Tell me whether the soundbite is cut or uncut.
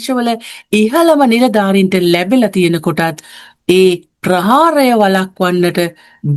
uncut